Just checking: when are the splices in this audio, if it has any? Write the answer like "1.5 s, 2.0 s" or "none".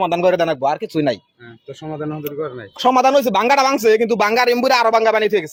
none